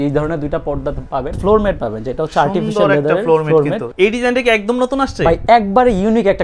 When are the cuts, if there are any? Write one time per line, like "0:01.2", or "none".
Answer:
0:01.4
0:03.9

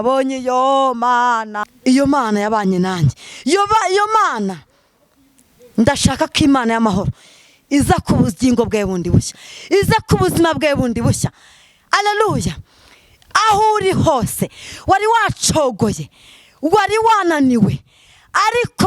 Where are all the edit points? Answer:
0:01.5

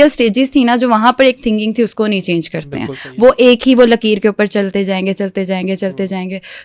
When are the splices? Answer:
none

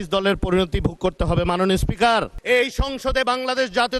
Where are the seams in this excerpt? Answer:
0:02.3

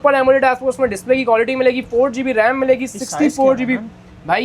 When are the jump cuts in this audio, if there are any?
none

